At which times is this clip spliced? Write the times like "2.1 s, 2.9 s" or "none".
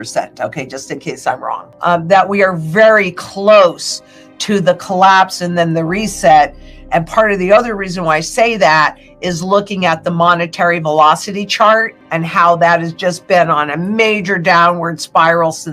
1.7 s